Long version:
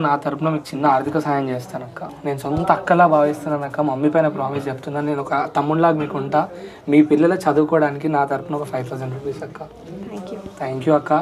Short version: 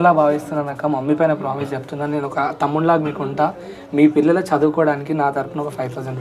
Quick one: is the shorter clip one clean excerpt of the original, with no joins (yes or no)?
yes